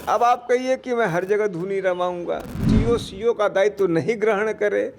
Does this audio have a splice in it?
yes; 1 cut; at 2.7 s

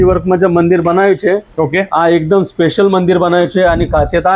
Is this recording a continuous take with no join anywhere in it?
yes; 0 cuts

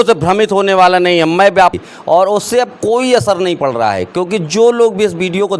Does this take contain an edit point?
yes; 1 cut; at 1.7 s

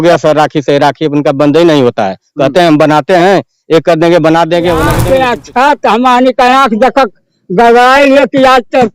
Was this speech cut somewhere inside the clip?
yes; 1 cut; at 5.0 s

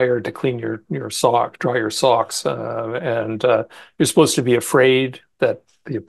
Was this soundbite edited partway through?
no; 0 cuts

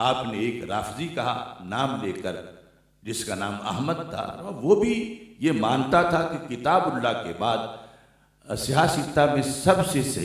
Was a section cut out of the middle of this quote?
no; 0 cuts

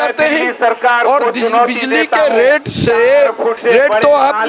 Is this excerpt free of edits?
no; 1 cut; at 3.6 s

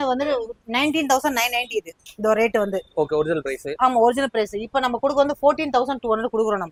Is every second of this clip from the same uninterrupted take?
yes; 0 cuts

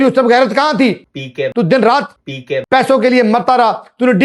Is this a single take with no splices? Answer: no; 1 cut; at 1.5 s

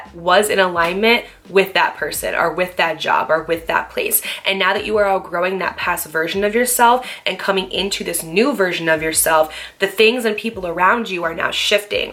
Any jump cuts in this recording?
no; 0 cuts

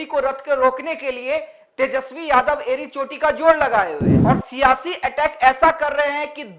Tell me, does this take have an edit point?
yes; 1 cut; at 4.1 s

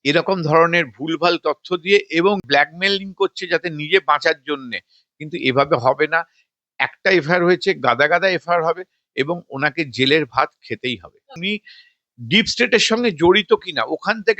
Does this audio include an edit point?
yes; 2 cuts; at 2.4 s, 11.4 s

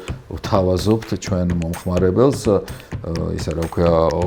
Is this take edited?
no; 0 cuts

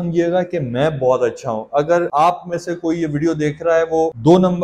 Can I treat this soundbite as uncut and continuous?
yes; 0 cuts

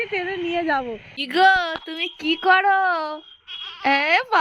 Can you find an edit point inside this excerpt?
yes; 1 cut; at 1.1 s

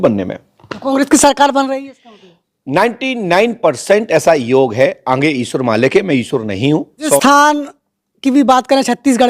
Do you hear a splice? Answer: yes; 1 cut; at 7.2 s

